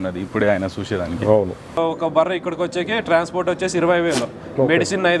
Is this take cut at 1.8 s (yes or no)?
yes